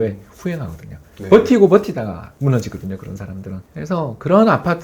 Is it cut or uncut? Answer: cut